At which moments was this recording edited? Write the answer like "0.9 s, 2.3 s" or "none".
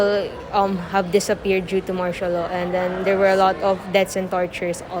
none